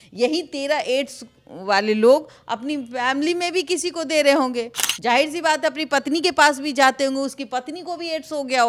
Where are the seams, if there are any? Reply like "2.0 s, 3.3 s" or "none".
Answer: none